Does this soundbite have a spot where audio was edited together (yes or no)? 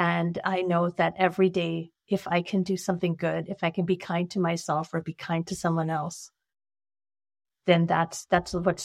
no